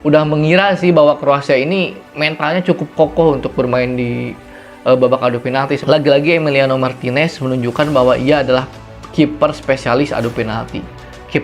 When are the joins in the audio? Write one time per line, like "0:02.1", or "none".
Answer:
0:05.8